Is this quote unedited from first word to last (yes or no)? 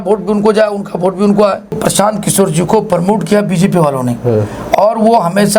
no